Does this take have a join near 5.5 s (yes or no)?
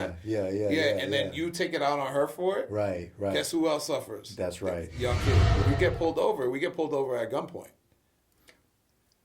yes